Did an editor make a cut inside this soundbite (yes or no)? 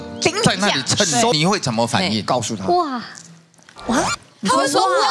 yes